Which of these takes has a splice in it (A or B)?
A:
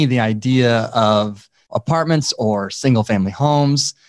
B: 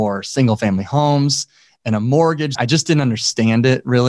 B